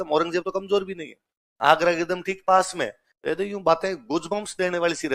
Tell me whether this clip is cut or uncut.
uncut